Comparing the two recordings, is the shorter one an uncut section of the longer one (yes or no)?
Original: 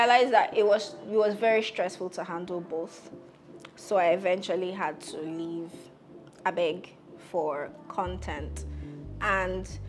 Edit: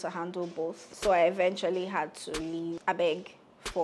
no